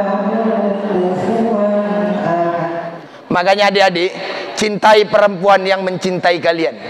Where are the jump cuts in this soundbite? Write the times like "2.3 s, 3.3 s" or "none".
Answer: 2.8 s